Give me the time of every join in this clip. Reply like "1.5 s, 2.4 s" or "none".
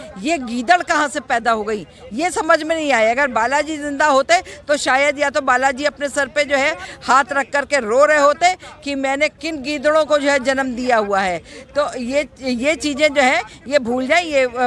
none